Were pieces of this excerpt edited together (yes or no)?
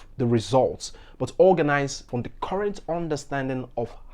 yes